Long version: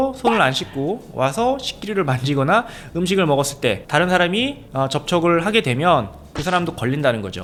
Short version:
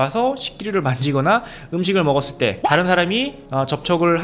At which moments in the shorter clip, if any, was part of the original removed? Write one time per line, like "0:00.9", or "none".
none